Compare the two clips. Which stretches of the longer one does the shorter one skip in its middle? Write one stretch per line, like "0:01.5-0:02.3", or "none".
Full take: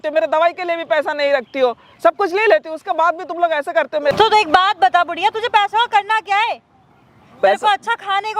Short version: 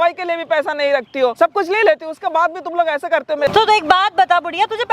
0:01.7-0:02.0